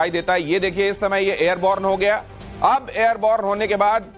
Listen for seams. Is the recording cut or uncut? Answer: uncut